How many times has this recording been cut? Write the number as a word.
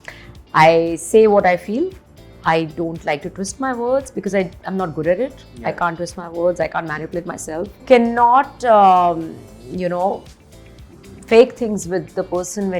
one